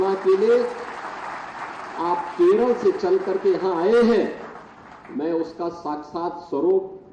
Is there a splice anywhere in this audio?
no; 0 cuts

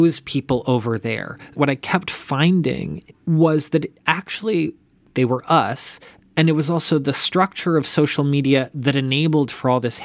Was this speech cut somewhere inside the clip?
yes; 3 cuts; at 1.5 s, 3.0 s, 4.9 s

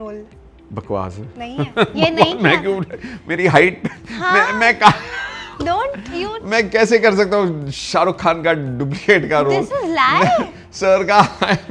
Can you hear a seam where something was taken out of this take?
no; 0 cuts

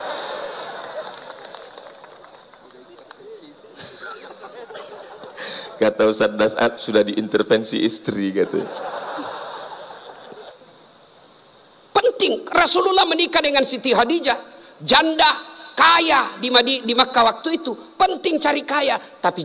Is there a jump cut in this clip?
yes; 1 cut; at 10.5 s

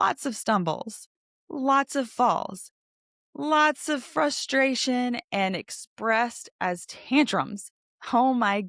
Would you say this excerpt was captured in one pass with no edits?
yes; 0 cuts

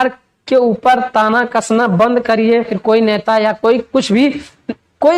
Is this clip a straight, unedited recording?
no; 1 cut; at 2.7 s

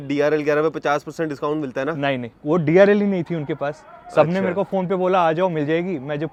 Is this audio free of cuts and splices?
yes; 0 cuts

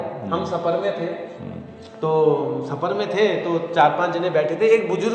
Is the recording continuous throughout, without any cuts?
yes; 0 cuts

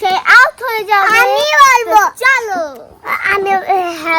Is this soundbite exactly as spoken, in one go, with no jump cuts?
no; 1 cut; at 2.3 s

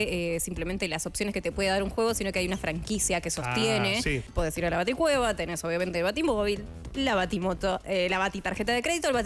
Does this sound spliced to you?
yes; 1 cut; at 4.2 s

